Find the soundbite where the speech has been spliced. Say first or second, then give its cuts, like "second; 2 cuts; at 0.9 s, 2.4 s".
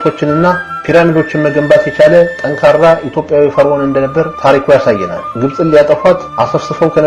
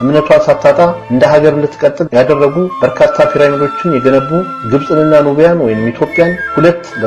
first; 1 cut; at 5.3 s